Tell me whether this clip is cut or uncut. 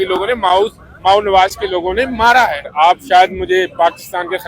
cut